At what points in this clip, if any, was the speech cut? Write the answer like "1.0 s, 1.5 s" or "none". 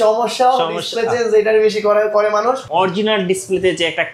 2.6 s